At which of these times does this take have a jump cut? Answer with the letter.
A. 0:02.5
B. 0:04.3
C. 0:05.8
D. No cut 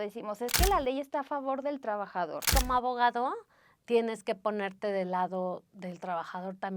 A